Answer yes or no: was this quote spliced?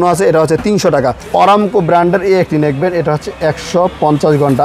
yes